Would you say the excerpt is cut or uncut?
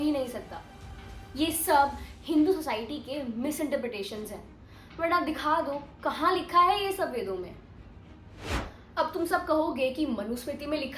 uncut